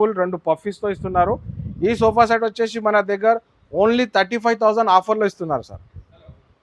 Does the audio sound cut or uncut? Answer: uncut